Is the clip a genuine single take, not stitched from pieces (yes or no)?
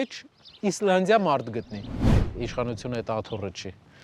no